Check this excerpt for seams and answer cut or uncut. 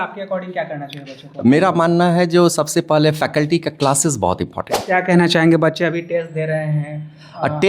cut